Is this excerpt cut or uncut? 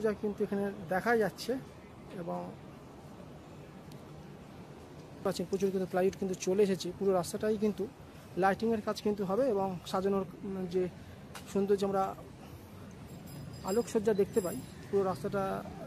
cut